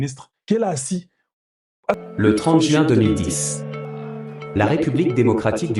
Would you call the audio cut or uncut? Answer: cut